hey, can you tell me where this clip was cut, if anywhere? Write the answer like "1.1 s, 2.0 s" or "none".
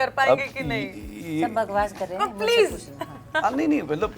none